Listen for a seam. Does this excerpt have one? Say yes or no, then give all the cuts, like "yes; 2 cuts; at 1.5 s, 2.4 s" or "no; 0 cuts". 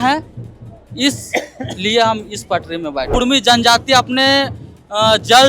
yes; 1 cut; at 3.1 s